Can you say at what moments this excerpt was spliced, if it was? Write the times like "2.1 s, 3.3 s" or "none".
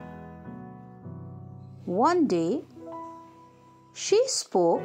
none